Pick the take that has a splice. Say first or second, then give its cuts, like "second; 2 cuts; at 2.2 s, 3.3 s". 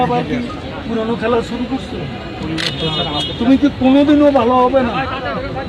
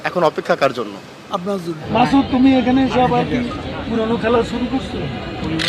second; 1 cut; at 1.8 s